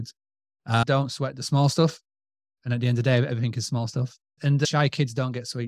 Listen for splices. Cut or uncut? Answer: cut